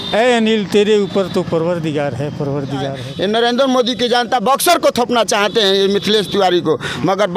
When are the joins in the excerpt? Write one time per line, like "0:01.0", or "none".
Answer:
0:03.0